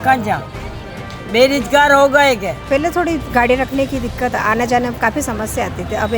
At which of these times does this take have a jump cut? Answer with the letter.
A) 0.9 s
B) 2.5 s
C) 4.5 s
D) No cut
B